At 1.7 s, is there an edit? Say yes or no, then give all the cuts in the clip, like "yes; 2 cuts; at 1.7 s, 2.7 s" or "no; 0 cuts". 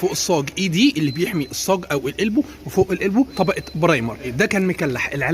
no; 2 cuts; at 3.3 s, 4.3 s